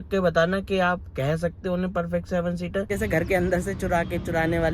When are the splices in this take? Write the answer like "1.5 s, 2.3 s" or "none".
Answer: 2.9 s